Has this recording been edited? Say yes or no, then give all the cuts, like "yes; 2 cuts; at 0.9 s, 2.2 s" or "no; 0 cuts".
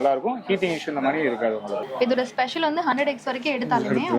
yes; 1 cut; at 1.8 s